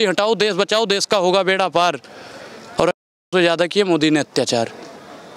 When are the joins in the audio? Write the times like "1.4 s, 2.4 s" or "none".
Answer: none